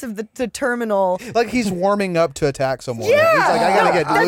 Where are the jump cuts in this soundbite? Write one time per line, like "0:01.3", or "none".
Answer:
0:01.2